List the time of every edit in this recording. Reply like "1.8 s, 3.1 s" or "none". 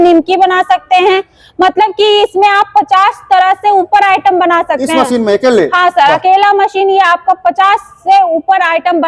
none